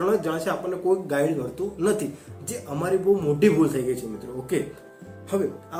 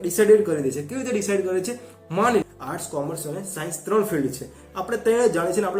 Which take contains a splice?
second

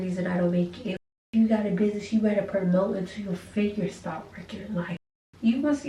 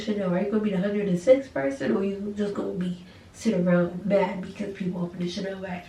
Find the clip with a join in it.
first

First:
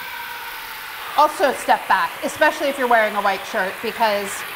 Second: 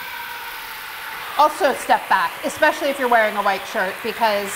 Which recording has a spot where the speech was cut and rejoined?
first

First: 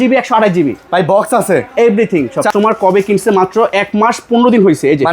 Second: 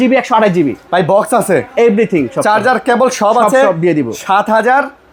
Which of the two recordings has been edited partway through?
first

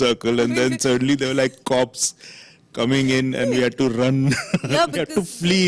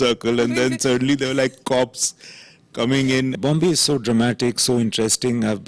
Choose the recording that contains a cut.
second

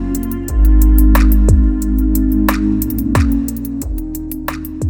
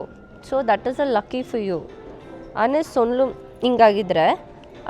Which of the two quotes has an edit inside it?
first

